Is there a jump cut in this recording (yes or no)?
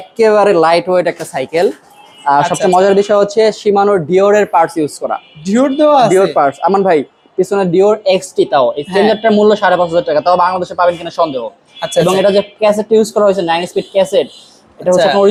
no